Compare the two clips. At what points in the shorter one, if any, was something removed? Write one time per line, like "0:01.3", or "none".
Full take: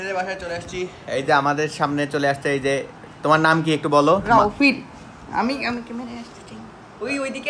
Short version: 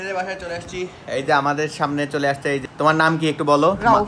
0:02.6

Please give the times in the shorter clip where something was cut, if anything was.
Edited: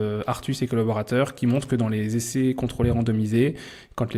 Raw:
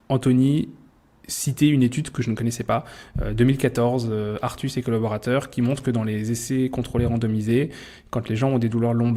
none

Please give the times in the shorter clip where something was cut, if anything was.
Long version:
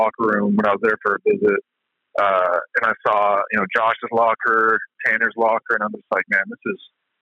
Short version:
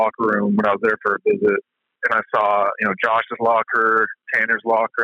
0:02.0

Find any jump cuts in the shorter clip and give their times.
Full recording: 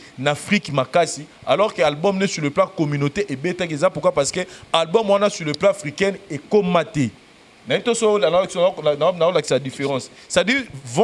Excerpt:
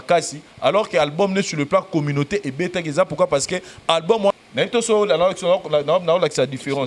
0:04.3

